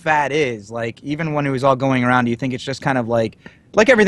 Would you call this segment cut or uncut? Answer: uncut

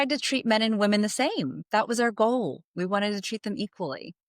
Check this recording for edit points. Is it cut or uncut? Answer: cut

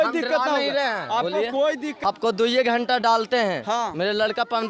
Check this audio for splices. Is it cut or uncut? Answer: cut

